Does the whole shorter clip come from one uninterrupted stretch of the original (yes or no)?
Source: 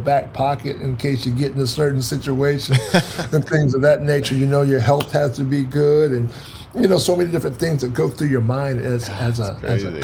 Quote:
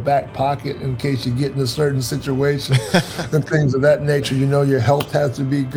yes